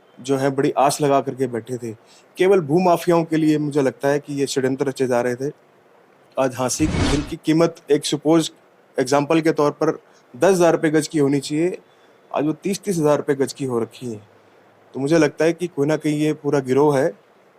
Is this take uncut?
no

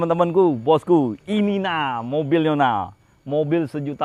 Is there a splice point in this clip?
no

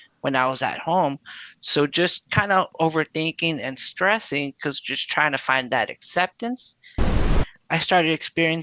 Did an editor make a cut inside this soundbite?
yes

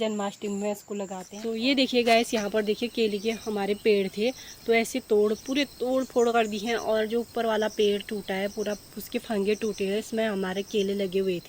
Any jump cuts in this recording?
yes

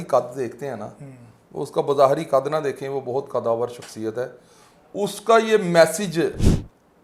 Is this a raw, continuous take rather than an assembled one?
yes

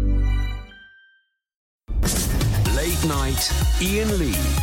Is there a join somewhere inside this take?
yes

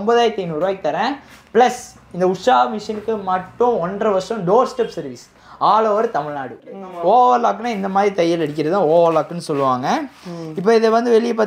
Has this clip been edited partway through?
yes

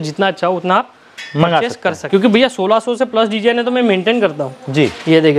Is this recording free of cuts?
no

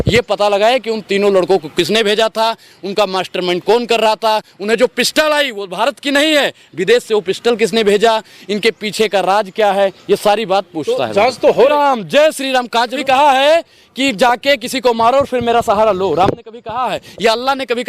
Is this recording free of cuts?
no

